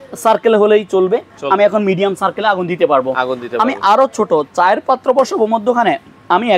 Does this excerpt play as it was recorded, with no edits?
yes; 0 cuts

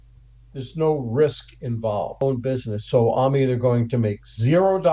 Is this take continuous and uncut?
no; 1 cut; at 2.2 s

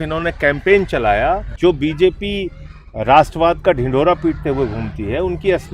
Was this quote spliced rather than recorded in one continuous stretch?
yes; 1 cut; at 1.5 s

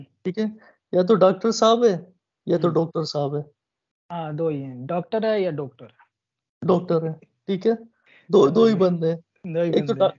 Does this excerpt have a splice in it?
no; 0 cuts

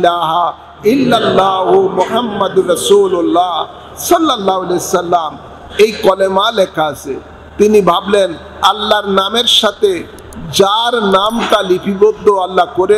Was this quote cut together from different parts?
no; 0 cuts

